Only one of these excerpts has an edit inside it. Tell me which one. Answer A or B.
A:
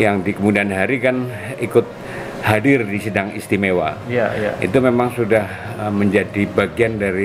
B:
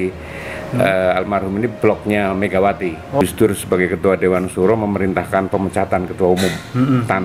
B